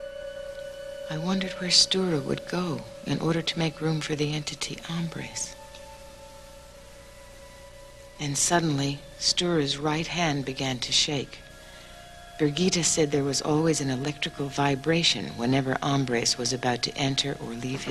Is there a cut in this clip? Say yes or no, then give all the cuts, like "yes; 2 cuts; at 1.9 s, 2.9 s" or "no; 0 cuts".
yes; 1 cut; at 4.3 s